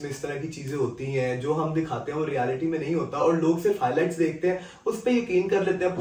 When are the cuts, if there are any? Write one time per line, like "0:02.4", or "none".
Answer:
none